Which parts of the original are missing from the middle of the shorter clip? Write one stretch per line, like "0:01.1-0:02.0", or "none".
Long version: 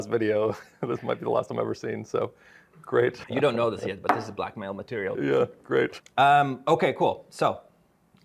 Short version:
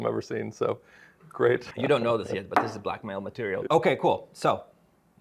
0:05.2-0:06.6